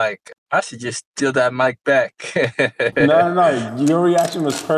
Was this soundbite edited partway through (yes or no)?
no